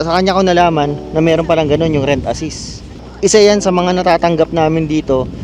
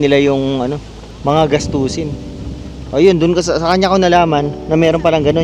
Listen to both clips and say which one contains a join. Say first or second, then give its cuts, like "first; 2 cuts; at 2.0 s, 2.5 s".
first; 1 cut; at 3.0 s